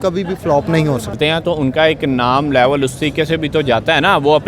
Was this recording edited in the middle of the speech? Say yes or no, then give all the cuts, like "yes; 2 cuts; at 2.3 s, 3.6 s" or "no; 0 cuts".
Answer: yes; 1 cut; at 1.1 s